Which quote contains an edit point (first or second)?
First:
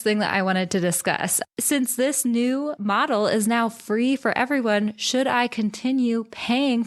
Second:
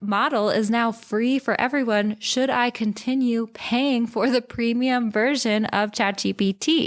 first